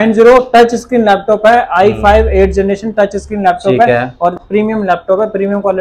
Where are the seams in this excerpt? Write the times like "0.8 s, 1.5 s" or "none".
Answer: none